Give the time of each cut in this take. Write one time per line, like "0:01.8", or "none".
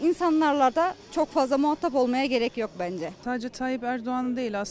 0:03.2